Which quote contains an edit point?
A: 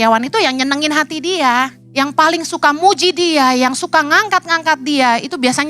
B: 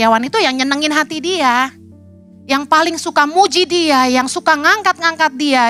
A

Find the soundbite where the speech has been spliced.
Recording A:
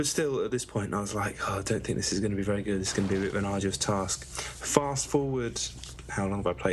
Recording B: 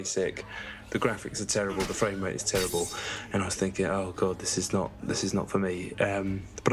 B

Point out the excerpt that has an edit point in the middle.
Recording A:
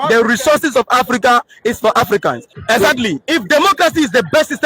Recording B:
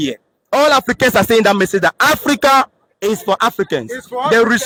A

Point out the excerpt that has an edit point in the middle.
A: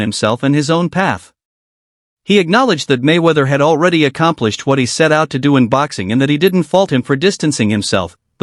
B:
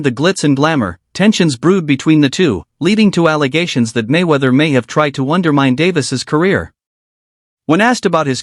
B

